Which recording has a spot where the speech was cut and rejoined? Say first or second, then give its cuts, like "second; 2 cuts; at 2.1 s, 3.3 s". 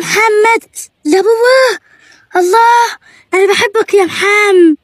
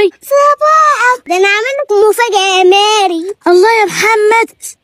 second; 1 cut; at 1.2 s